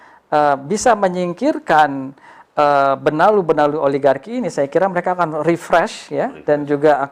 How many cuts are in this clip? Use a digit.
0